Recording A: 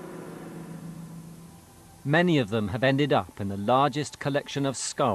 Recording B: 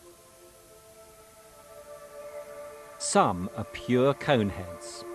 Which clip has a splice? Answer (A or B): A